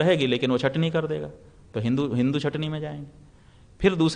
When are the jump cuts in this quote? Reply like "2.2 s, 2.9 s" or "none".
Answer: none